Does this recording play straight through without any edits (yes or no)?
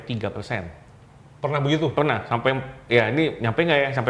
yes